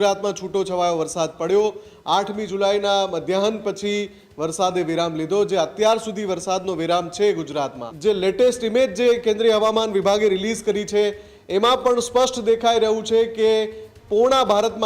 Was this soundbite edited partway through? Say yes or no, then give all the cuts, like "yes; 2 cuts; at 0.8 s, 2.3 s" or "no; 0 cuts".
yes; 1 cut; at 7.8 s